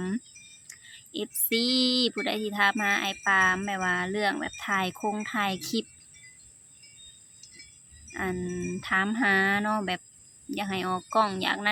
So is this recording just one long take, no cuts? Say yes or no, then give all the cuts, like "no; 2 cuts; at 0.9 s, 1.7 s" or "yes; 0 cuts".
yes; 0 cuts